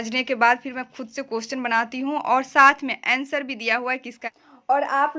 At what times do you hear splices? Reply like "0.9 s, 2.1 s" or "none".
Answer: 4.2 s